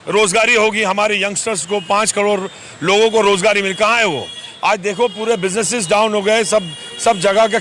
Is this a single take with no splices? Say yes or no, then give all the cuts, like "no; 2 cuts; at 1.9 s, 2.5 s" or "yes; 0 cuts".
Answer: yes; 0 cuts